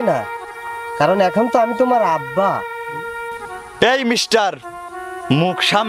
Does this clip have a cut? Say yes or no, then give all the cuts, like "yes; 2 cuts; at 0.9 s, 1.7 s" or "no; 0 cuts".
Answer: no; 0 cuts